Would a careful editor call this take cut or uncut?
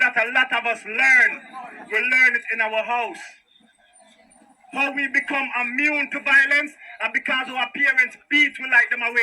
uncut